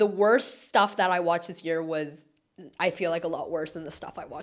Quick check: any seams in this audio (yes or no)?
no